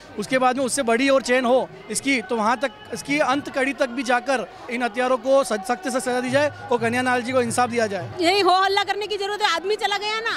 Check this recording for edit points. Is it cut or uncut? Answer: cut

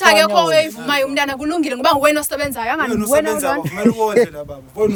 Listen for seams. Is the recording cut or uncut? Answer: uncut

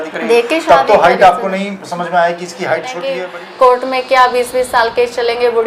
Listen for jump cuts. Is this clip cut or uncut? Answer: cut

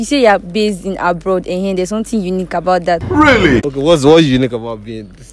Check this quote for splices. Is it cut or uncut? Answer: cut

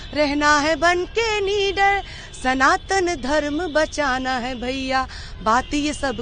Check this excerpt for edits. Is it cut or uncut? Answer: uncut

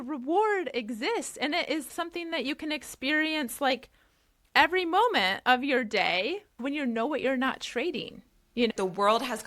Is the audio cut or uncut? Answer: cut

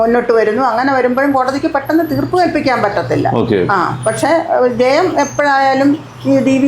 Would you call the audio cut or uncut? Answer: uncut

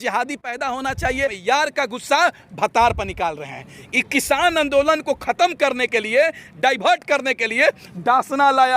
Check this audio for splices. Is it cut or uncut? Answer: cut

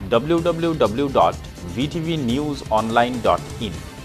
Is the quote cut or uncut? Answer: uncut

